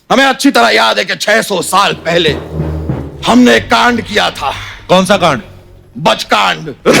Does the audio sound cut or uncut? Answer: uncut